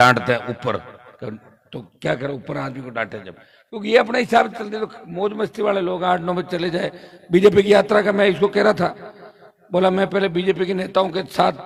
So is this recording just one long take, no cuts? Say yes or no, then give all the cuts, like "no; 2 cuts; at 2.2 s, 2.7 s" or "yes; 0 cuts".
yes; 0 cuts